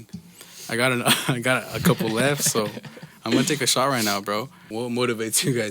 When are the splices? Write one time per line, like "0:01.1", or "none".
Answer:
0:04.6